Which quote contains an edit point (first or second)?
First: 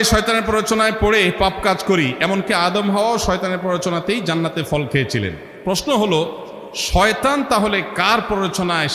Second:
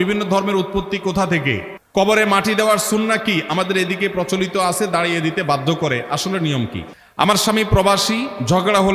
second